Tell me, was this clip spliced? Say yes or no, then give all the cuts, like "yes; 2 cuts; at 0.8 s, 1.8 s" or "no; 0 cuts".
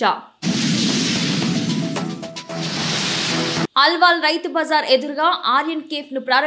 no; 0 cuts